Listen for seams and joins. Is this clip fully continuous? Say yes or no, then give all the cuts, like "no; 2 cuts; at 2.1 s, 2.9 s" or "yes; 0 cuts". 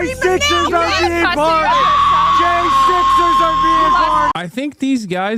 no; 1 cut; at 4.4 s